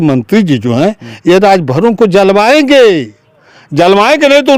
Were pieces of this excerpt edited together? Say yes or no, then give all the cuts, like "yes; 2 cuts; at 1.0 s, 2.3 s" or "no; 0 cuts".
no; 0 cuts